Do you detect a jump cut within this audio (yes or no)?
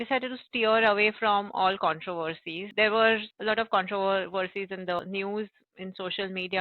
yes